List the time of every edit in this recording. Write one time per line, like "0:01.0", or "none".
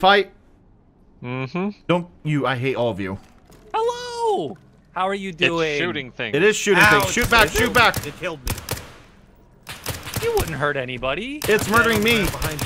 0:03.6